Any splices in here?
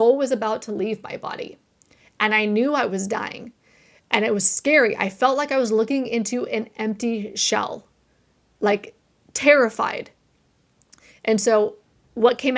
no; 0 cuts

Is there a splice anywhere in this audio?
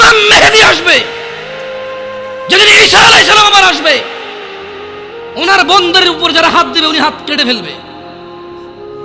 yes; 2 cuts; at 1.1 s, 2.5 s

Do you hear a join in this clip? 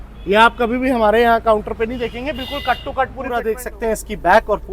yes; 1 cut; at 3.4 s

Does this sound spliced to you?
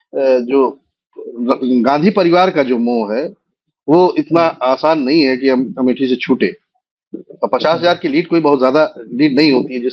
no; 0 cuts

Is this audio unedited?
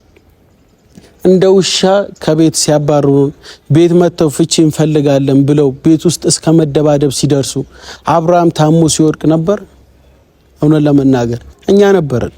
no; 1 cut; at 11.5 s

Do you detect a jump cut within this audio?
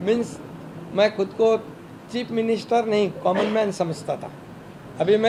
no; 0 cuts

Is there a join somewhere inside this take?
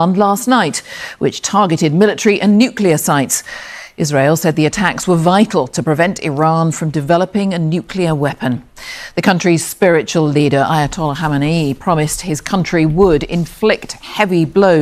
no; 0 cuts

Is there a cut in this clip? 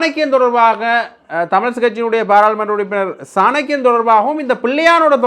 no; 0 cuts

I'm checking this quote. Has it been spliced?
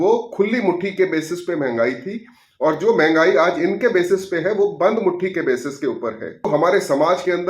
yes; 1 cut; at 6.5 s

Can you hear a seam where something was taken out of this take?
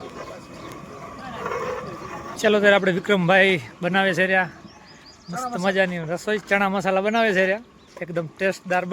yes; 1 cut; at 2.3 s

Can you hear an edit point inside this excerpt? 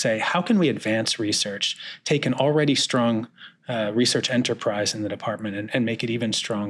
no; 0 cuts

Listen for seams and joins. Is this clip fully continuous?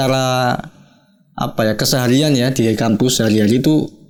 yes; 0 cuts

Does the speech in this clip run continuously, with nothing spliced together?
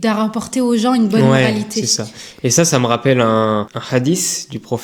yes; 0 cuts

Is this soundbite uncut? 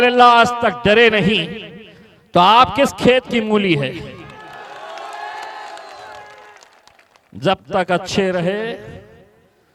yes; 0 cuts

